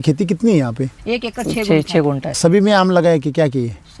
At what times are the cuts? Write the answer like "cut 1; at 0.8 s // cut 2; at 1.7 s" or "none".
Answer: cut 1; at 1.0 s // cut 2; at 2.3 s